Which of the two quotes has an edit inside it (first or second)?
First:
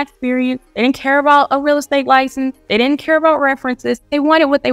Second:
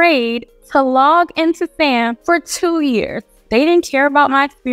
second